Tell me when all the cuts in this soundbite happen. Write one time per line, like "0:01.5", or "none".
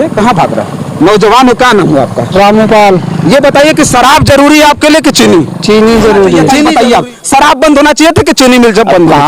0:06.7